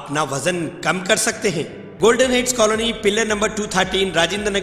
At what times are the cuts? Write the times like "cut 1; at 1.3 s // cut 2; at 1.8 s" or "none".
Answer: cut 1; at 1.8 s